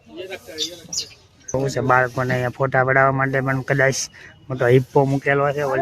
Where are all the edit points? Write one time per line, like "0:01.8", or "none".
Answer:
0:01.5